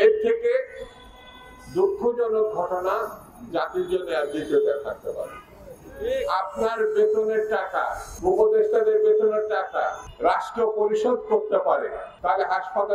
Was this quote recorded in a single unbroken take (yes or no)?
no